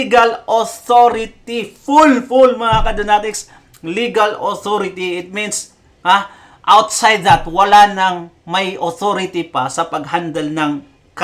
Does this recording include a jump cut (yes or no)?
no